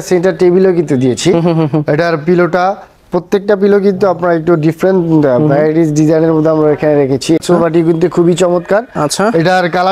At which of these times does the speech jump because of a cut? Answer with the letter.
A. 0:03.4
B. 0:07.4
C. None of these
B